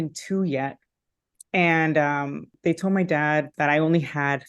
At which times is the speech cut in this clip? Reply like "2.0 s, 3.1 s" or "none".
2.4 s, 3.5 s